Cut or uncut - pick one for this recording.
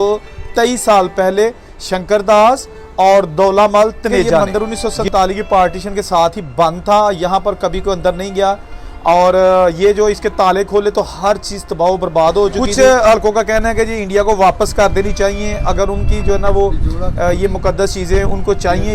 cut